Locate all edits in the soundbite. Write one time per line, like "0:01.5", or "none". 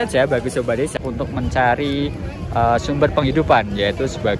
0:01.0